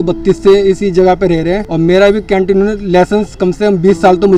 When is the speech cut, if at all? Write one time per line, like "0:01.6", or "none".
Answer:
none